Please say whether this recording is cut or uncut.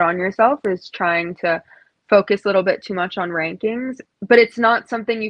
cut